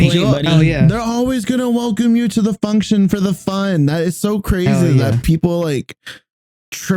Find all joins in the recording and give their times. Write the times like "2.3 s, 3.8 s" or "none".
none